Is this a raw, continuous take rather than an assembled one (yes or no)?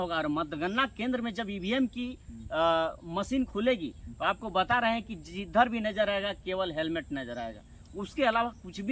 yes